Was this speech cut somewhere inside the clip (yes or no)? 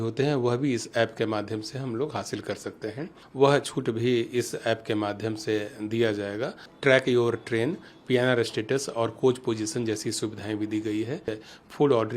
yes